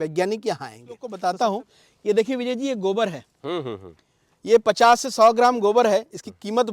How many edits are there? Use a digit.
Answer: 1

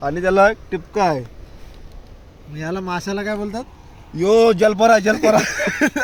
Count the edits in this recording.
0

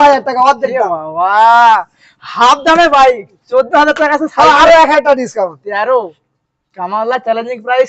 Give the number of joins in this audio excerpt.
0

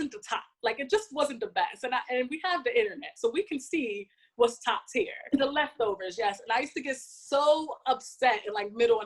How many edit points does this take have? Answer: 1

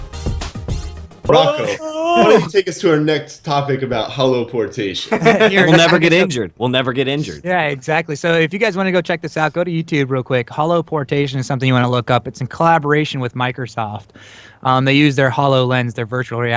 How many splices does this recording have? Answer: 1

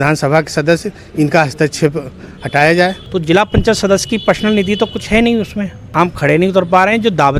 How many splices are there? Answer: 2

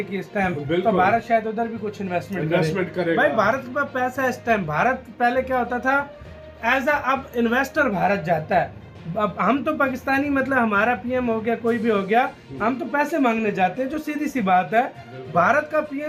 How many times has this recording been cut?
0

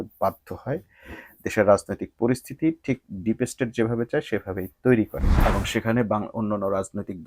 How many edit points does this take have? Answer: 1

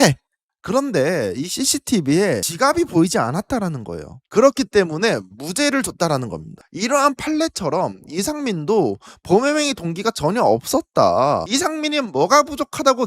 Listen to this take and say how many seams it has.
1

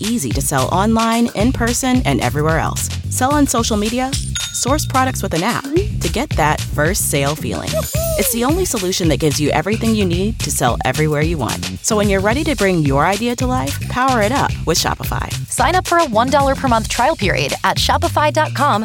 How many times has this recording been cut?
0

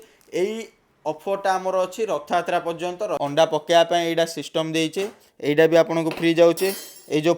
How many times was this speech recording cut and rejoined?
1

